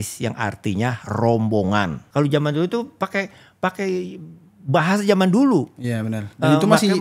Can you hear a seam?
yes; 1 cut; at 2.0 s

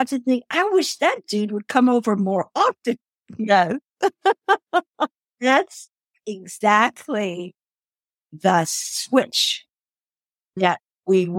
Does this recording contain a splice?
no; 0 cuts

